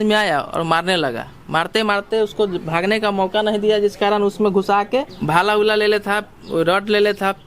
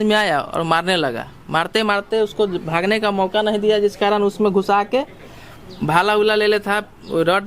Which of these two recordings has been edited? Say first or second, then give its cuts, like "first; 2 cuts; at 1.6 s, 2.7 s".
first; 1 cut; at 5.2 s